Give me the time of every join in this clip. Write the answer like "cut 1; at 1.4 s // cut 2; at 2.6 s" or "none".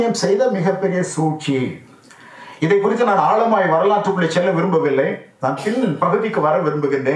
none